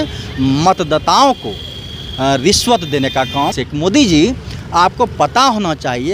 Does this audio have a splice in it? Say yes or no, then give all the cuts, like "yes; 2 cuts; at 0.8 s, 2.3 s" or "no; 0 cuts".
yes; 1 cut; at 3.6 s